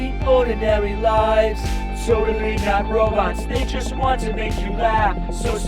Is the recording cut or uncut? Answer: uncut